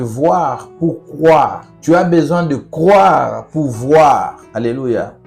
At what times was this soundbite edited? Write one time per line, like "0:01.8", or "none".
0:01.7
0:04.4